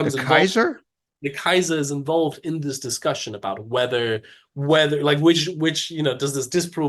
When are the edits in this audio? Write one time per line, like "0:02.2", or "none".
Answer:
none